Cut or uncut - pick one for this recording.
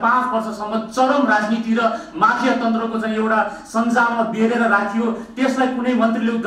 uncut